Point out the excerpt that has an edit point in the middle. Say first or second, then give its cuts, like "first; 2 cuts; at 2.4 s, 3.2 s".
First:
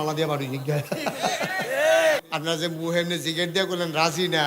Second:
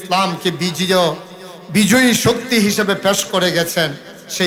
first; 1 cut; at 2.2 s